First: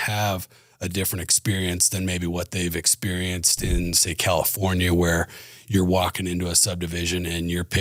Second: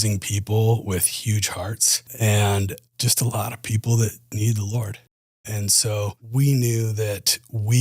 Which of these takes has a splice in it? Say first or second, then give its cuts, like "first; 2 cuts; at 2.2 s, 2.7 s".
second; 5 cuts; at 2.1 s, 2.9 s, 4.3 s, 5.5 s, 6.2 s